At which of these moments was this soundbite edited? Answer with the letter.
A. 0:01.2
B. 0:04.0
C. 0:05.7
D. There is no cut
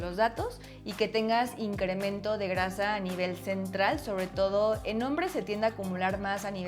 D